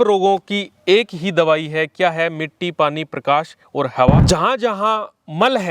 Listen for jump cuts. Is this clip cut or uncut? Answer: cut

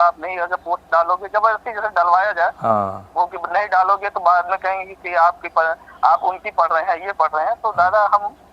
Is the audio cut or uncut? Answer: uncut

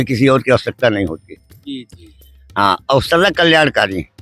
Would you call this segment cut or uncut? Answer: uncut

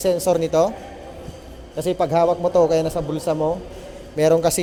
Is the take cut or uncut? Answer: uncut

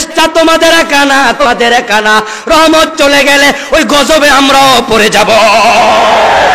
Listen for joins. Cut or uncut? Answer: cut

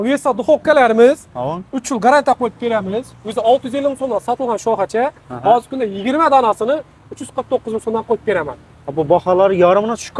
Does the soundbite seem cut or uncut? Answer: uncut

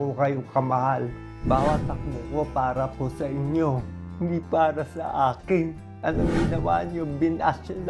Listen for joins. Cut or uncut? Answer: cut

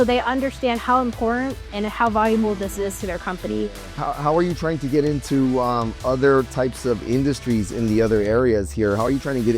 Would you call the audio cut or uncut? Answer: cut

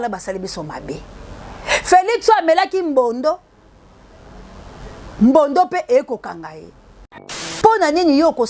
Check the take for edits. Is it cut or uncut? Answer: cut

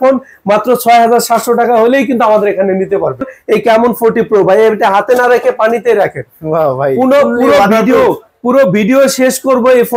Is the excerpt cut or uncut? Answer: cut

